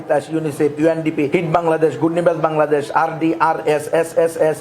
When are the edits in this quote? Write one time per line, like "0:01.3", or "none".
0:01.3